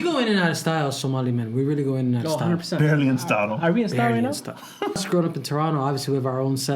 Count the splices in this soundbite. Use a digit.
1